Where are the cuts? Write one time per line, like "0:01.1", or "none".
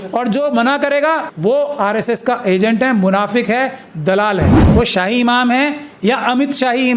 0:01.3
0:04.6